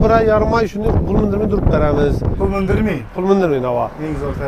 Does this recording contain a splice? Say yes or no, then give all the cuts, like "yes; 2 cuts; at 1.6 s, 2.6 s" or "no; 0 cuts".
no; 0 cuts